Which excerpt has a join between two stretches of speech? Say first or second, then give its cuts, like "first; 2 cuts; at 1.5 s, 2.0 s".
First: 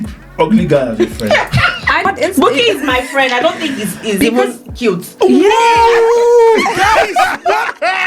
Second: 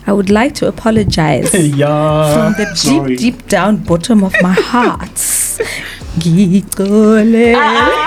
first; 1 cut; at 2.1 s